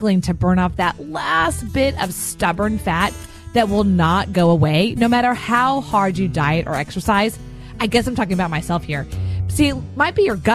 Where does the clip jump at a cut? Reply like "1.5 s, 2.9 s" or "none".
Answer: none